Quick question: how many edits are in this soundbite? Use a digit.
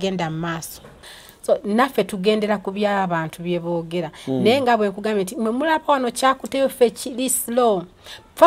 1